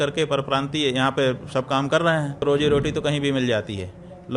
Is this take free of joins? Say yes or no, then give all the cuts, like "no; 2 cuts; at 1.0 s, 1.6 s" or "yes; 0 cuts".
no; 1 cut; at 2.4 s